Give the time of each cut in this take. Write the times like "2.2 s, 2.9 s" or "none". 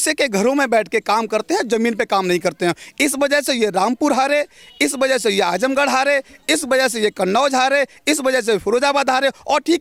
none